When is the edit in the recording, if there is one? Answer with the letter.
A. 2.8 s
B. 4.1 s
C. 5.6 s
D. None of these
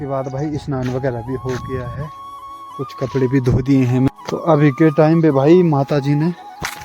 B